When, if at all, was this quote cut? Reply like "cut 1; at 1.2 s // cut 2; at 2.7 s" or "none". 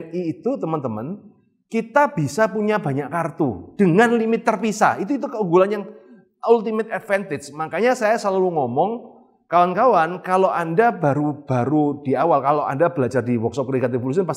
none